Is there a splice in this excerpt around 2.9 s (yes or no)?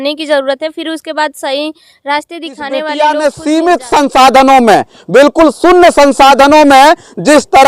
yes